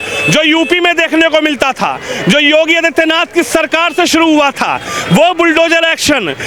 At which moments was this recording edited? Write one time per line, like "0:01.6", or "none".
none